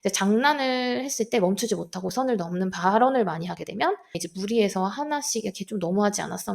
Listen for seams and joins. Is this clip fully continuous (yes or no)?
no